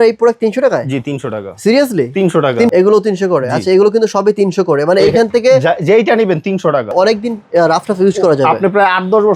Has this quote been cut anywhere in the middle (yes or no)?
yes